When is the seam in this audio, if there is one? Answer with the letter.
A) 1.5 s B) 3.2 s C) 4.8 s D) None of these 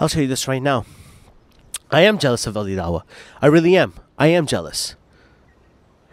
D